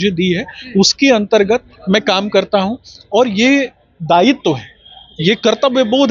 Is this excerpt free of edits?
yes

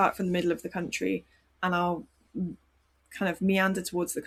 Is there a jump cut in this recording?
no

